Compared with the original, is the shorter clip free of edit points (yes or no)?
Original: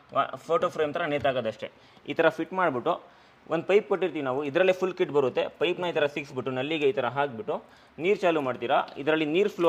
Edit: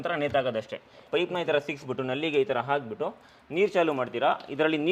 no